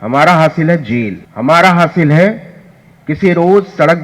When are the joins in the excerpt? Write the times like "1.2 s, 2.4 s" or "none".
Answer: 1.2 s